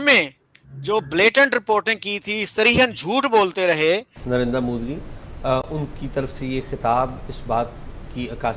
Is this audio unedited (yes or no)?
no